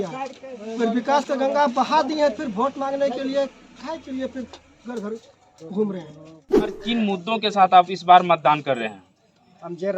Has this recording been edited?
yes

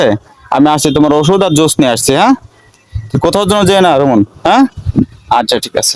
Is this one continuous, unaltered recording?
yes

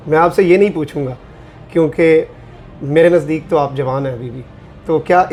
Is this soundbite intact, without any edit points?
yes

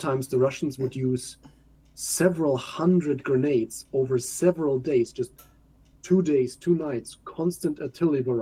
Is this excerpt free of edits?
yes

